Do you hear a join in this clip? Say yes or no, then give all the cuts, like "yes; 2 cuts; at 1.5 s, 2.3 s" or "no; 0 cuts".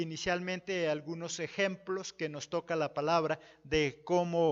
no; 0 cuts